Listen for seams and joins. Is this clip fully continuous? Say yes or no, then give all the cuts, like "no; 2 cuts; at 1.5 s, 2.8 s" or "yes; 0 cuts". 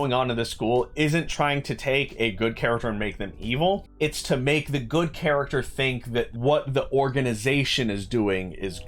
no; 2 cuts; at 3.9 s, 6.3 s